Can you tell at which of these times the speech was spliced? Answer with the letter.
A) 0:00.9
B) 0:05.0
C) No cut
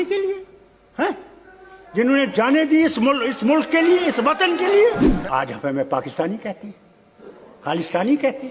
B